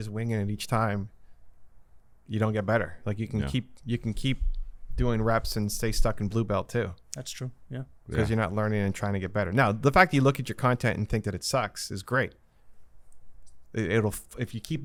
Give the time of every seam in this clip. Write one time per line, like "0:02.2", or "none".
none